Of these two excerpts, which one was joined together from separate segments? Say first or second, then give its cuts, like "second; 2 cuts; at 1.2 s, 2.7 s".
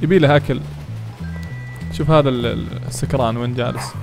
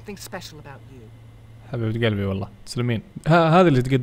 second; 1 cut; at 3.1 s